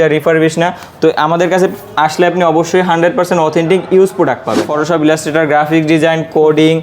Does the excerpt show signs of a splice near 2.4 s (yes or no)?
no